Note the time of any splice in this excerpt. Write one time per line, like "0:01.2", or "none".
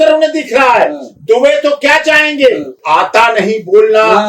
0:02.8